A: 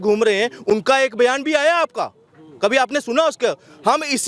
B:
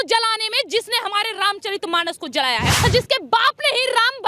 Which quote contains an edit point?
B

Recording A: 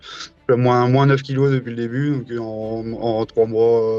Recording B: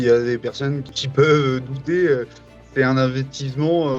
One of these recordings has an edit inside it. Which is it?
B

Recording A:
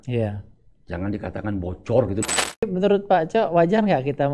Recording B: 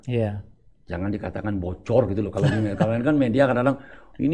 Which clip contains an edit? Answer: A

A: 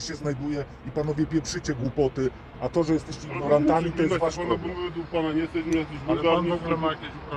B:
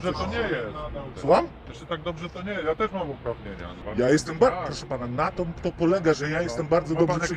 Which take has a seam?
B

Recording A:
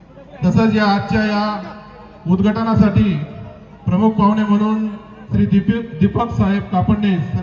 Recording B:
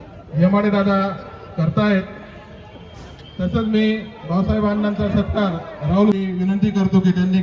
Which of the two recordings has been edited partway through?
B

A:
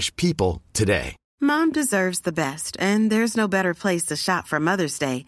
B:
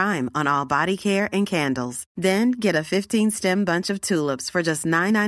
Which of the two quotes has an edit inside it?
A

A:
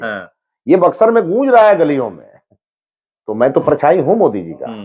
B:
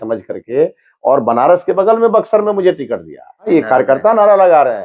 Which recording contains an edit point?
B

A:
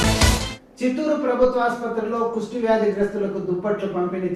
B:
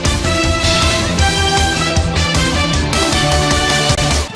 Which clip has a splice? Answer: B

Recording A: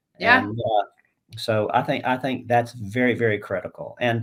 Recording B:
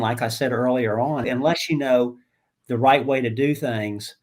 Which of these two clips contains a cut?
B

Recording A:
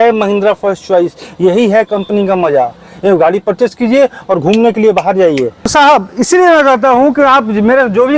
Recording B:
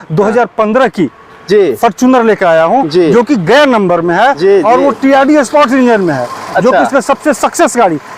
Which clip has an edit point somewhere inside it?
A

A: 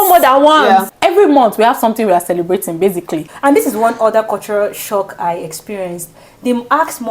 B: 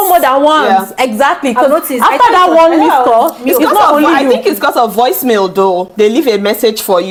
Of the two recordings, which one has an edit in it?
A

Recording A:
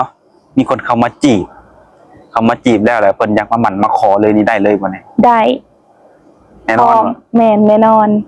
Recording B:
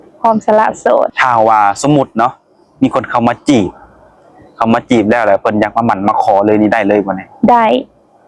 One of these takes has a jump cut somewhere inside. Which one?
B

